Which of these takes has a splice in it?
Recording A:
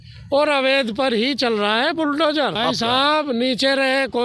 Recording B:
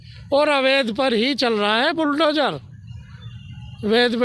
A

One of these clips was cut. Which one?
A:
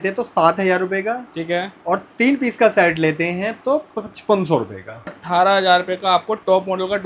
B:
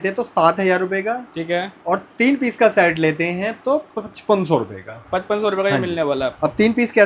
A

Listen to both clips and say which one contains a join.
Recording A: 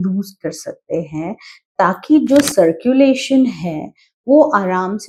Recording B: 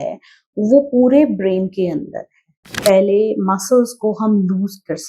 B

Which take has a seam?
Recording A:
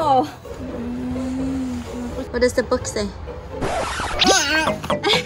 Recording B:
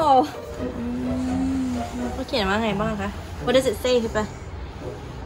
A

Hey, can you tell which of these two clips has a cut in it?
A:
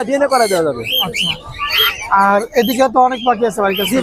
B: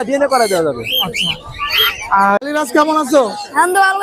B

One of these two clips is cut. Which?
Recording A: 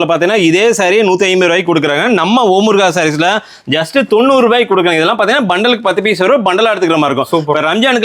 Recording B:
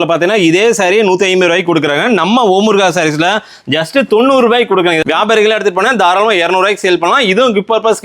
B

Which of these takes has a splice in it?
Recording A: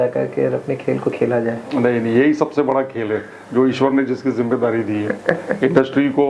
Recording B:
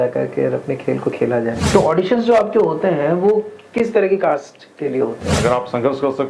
B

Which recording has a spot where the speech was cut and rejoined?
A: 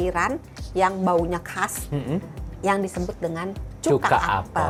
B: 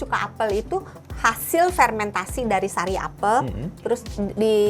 B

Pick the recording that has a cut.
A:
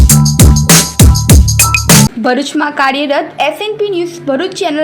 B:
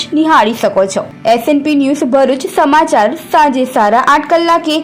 A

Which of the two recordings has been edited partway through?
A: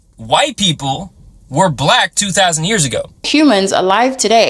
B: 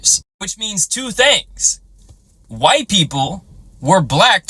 A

